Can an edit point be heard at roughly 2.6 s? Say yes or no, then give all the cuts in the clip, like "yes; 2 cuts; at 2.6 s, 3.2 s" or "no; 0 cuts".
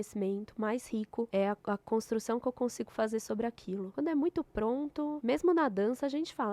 no; 3 cuts; at 1.3 s, 3.9 s, 5.2 s